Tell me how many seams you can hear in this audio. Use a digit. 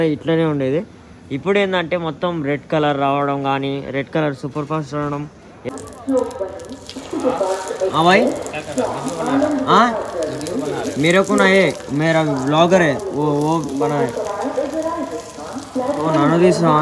1